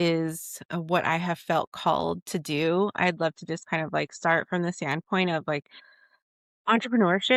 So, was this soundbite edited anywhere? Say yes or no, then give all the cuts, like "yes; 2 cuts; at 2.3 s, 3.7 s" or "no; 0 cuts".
no; 0 cuts